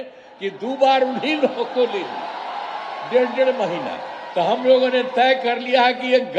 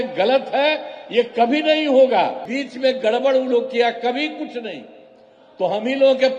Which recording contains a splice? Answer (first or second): second